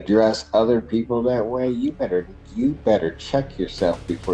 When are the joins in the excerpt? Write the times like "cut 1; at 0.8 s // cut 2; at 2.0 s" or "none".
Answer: none